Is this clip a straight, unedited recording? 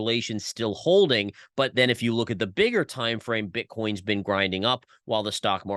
yes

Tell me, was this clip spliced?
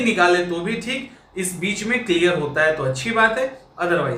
no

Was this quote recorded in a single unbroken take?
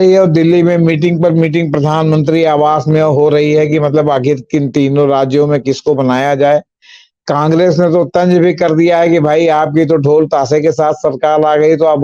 yes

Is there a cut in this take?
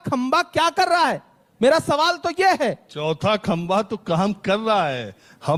no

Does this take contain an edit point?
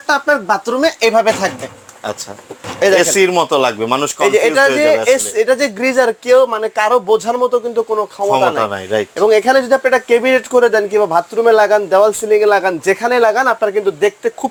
no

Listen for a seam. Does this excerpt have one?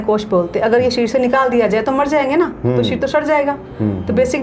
no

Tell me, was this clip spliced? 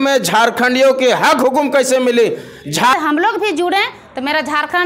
yes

